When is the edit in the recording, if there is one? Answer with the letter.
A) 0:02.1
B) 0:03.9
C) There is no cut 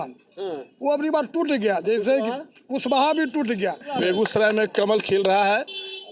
B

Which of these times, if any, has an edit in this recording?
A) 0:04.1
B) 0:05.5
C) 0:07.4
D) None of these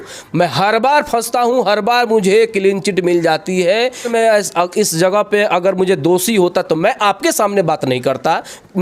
A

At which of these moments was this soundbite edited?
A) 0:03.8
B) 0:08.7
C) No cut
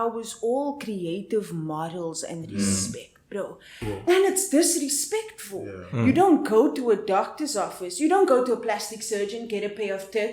A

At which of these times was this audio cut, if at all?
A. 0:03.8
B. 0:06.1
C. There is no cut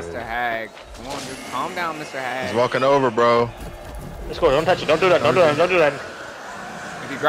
C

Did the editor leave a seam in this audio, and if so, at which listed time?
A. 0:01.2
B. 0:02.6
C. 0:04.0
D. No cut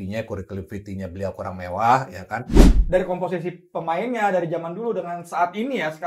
B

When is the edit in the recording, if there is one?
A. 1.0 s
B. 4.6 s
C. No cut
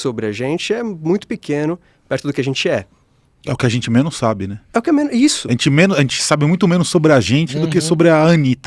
C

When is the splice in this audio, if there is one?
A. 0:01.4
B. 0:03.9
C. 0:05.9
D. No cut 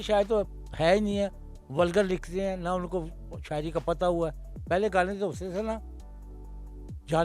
D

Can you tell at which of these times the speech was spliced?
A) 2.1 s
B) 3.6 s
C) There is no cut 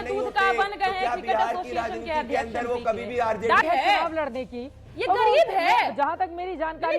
B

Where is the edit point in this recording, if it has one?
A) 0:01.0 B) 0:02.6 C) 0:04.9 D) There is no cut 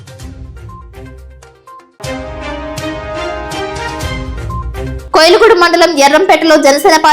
C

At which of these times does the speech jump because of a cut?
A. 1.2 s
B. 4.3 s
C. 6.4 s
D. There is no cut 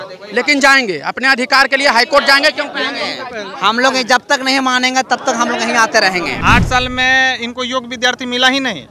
C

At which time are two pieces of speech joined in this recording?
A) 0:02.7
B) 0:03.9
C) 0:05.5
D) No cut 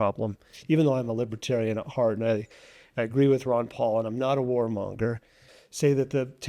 C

